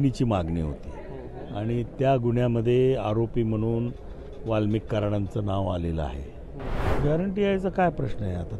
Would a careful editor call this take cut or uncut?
cut